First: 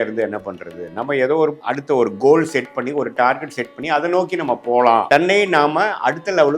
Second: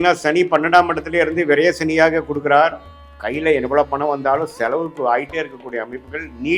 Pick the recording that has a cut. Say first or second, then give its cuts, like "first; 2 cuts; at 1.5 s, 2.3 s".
first; 2 cuts; at 1.6 s, 5.0 s